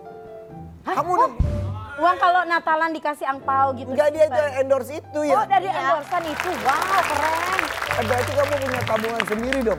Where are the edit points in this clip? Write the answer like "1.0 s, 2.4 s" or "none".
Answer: none